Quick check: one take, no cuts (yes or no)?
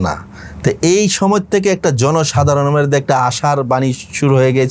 yes